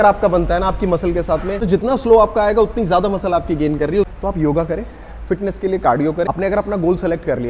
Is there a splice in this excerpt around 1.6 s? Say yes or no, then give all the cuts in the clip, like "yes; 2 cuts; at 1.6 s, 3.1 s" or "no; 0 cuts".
yes; 3 cuts; at 1.6 s, 4.1 s, 6.3 s